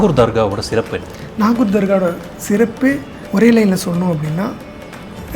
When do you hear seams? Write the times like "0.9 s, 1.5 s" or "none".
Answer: 3.1 s